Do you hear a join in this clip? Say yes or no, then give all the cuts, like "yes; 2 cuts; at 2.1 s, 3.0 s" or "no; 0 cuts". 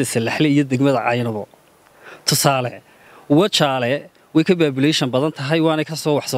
no; 0 cuts